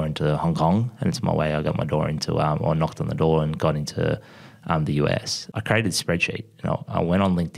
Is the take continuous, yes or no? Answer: no